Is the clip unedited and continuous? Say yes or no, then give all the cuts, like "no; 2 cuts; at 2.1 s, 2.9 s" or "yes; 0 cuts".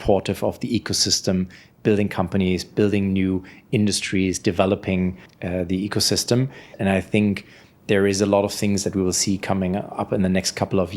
no; 1 cut; at 6.7 s